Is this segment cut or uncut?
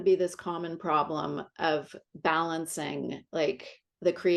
uncut